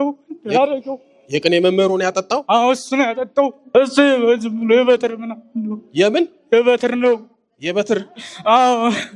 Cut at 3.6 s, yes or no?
yes